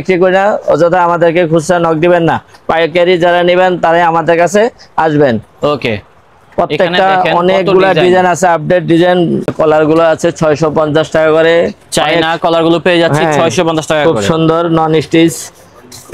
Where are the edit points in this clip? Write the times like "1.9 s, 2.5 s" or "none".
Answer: 9.5 s